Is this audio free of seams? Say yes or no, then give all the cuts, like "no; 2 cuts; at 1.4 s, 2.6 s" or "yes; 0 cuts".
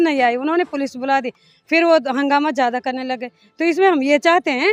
yes; 0 cuts